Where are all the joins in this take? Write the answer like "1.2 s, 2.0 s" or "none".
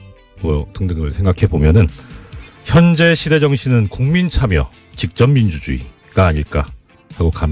6.3 s